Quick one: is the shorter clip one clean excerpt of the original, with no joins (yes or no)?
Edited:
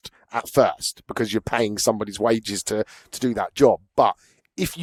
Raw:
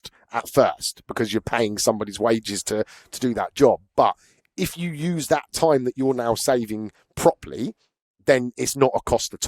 yes